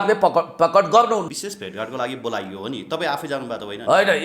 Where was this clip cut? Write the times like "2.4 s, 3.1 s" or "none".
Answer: 1.3 s